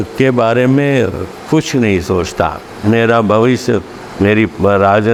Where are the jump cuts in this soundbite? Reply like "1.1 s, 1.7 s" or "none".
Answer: none

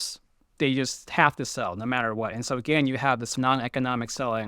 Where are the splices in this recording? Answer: 3.3 s

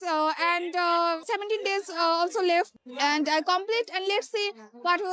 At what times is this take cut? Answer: 1.2 s, 2.8 s

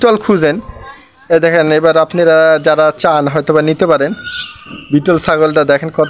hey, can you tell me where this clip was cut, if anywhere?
none

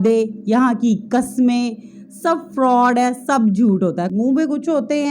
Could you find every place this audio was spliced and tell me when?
4.1 s

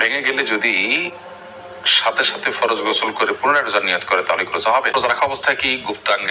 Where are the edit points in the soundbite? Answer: 4.9 s

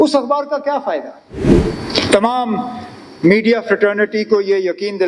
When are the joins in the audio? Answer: 1.5 s

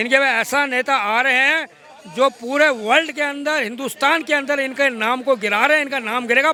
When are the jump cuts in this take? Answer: none

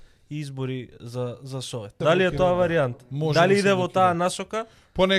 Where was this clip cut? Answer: 2.0 s

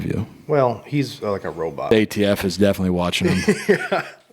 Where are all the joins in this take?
1.9 s

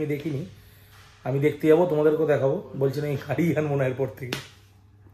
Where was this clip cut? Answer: none

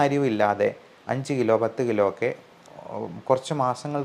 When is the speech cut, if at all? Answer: none

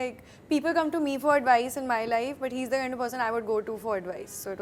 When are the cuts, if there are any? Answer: none

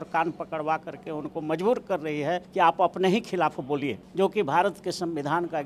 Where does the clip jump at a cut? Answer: 2.5 s, 4.0 s

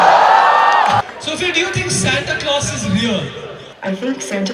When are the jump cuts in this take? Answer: 1.0 s, 3.6 s

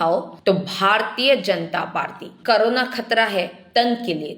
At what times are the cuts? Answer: 2.3 s

